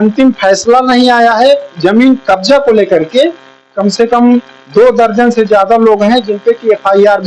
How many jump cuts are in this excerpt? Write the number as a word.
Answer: one